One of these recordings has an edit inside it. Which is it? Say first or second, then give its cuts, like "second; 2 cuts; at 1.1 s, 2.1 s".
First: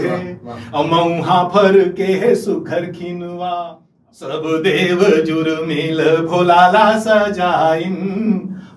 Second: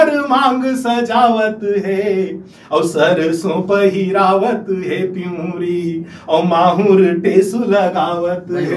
first; 1 cut; at 4.5 s